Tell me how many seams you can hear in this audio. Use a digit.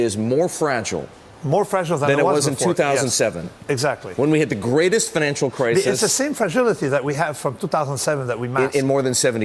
0